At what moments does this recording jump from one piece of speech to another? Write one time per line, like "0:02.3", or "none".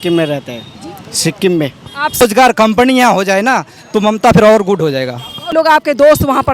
0:02.2
0:05.5